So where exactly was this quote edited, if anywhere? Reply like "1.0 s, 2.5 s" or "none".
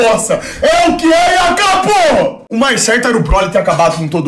2.4 s